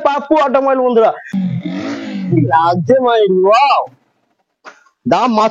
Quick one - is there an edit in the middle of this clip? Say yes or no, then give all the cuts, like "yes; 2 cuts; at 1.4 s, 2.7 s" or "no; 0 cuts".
yes; 1 cut; at 1.4 s